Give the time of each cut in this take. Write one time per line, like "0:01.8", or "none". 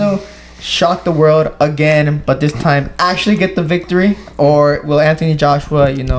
none